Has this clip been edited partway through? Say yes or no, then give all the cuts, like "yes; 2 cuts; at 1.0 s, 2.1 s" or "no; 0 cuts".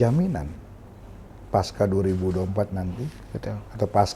no; 0 cuts